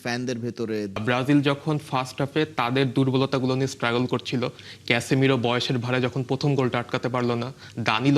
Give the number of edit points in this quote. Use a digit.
1